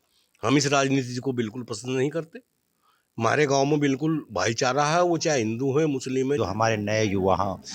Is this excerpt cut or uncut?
cut